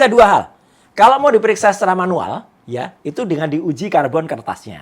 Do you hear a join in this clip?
no; 0 cuts

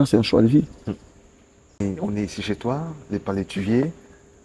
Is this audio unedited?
no; 1 cut; at 1.8 s

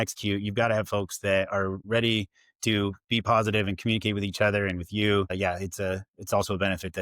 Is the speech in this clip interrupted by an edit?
yes; 2 cuts; at 1.8 s, 5.3 s

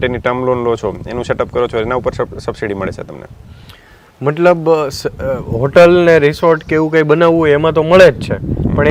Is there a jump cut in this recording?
no; 0 cuts

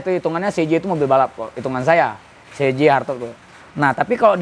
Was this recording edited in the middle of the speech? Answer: no; 0 cuts

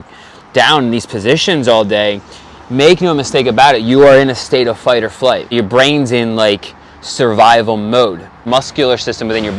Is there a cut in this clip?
yes; 2 cuts; at 5.5 s, 8.4 s

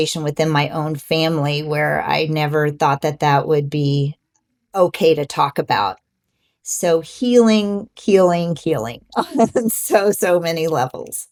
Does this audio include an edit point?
no; 0 cuts

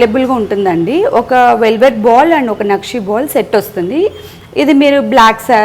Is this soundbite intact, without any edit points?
yes; 0 cuts

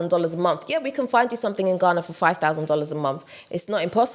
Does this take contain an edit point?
no; 0 cuts

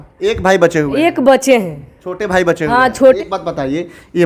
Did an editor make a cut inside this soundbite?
no; 0 cuts

